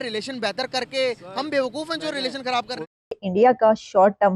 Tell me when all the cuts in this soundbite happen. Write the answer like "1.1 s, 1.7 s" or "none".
3.0 s